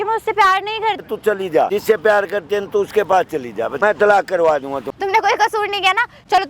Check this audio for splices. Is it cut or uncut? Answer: cut